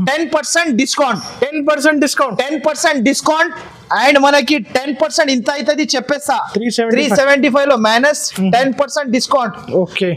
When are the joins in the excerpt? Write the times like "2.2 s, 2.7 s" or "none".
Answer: none